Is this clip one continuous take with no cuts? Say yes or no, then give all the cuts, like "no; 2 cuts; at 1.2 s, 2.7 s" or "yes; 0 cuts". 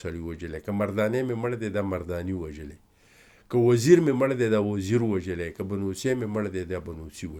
yes; 0 cuts